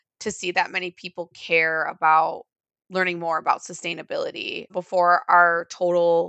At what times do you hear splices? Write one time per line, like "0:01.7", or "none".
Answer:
0:04.7